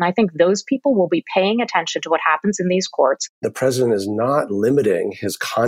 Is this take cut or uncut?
cut